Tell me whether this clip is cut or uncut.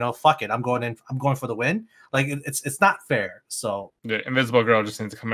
cut